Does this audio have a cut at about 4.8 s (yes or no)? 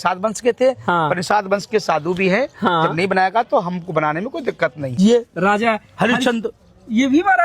yes